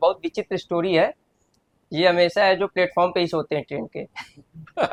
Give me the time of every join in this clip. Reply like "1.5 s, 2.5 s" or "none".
none